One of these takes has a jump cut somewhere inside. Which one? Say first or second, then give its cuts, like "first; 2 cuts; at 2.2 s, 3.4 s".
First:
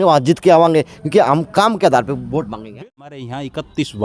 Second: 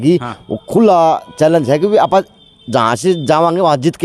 first; 1 cut; at 2.6 s